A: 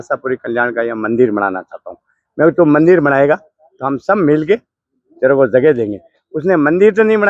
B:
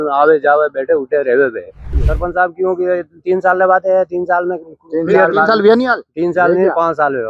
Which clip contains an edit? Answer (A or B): B